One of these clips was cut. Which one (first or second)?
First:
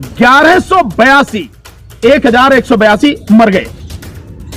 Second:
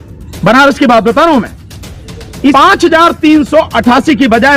second